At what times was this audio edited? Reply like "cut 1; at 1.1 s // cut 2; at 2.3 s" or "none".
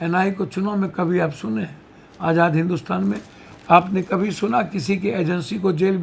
none

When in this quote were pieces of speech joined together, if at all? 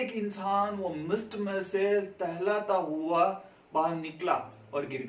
none

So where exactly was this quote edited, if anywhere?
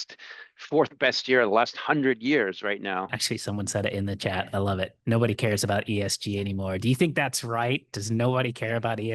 cut 1; at 3.2 s

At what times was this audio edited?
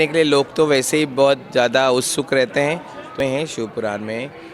cut 1; at 3.2 s

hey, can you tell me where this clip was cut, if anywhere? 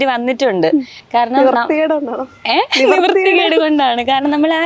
none

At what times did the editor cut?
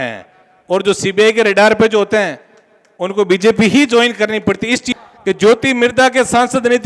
cut 1; at 4.9 s

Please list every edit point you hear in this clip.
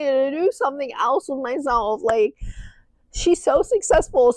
none

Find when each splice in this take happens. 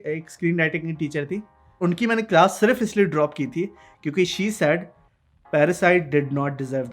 cut 1; at 1.8 s

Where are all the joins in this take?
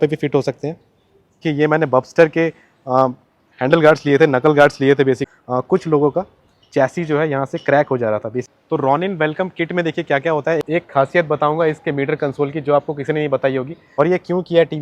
cut 1; at 1.4 s // cut 2; at 5.3 s // cut 3; at 8.5 s // cut 4; at 10.6 s // cut 5; at 13.8 s

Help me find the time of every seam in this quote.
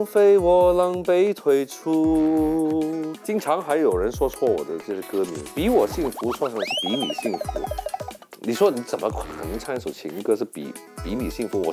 cut 1; at 3.1 s

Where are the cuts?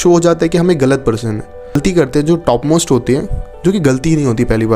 cut 1; at 1.8 s

